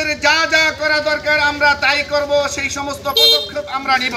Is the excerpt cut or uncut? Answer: uncut